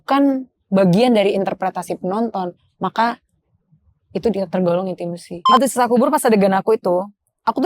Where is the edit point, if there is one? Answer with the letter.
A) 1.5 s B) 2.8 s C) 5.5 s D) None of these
C